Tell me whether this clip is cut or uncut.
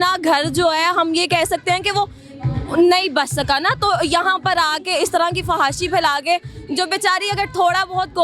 uncut